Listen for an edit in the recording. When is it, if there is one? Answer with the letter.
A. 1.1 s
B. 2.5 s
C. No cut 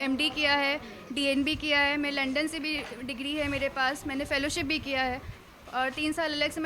C